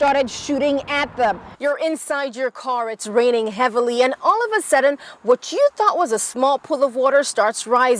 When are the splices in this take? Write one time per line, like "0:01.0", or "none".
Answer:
0:01.5